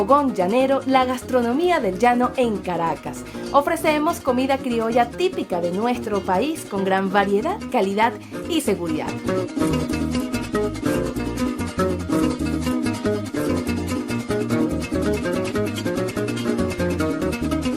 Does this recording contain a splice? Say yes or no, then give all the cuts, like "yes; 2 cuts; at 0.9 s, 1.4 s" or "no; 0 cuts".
no; 0 cuts